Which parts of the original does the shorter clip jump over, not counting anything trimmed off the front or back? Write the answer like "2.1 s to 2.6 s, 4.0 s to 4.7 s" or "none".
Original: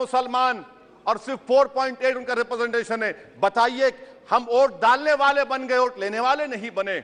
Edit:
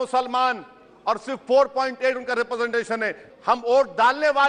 3.2 s to 4.1 s